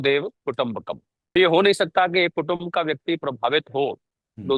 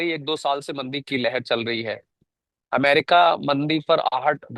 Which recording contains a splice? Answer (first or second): first